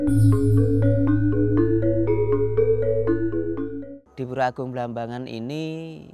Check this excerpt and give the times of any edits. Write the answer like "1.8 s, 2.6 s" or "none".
3.7 s